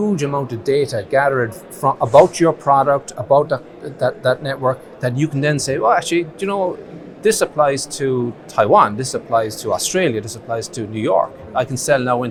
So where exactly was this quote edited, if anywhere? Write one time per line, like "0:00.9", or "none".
none